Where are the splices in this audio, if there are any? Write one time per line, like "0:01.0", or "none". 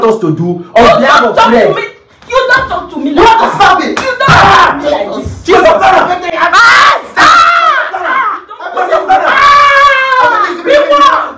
none